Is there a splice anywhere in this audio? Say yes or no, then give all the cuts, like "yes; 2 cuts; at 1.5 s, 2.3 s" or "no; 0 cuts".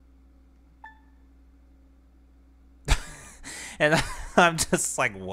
no; 0 cuts